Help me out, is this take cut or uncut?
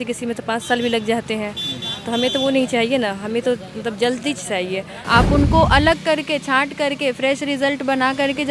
cut